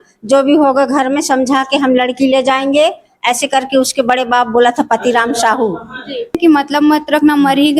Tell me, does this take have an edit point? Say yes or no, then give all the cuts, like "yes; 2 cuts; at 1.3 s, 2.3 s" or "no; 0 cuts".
yes; 1 cut; at 6.4 s